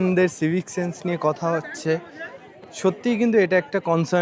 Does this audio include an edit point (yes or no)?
no